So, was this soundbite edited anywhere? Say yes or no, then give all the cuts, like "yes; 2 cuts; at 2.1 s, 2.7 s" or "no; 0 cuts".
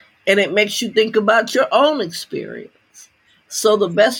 no; 0 cuts